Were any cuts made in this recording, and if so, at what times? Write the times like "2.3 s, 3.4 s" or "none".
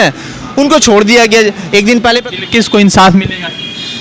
2.2 s